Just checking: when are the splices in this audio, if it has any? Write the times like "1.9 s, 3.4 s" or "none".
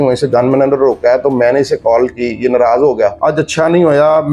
3.2 s